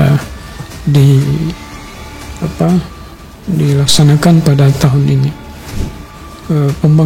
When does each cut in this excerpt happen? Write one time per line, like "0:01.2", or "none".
0:05.9